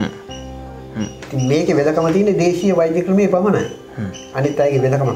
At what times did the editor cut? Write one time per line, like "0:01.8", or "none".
none